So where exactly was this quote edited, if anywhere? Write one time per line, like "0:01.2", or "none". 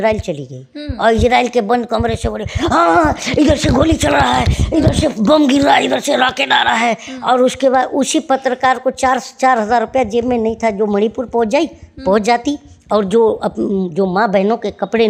none